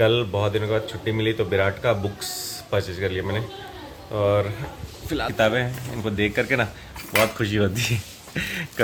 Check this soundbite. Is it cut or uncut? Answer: uncut